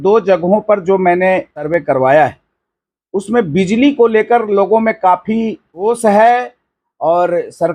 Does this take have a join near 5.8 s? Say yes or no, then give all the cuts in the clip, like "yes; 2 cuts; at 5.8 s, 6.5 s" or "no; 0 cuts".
yes; 2 cuts; at 1.7 s, 5.8 s